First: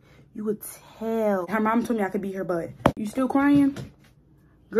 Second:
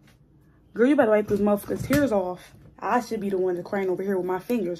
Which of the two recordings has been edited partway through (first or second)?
first